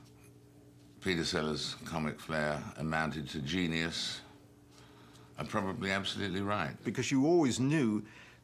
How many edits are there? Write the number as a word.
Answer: one